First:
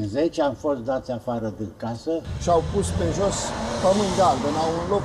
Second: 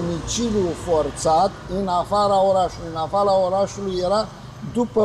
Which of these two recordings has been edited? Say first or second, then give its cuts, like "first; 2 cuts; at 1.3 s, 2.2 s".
first; 1 cut; at 2.3 s